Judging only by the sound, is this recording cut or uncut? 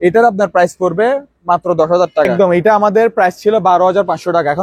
cut